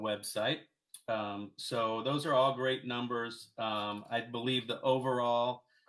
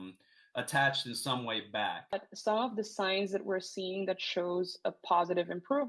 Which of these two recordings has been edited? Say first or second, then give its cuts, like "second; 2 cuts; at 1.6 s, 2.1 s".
second; 1 cut; at 2.2 s